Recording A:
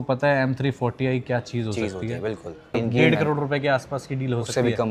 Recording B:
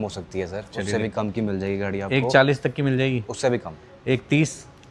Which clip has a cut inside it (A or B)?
A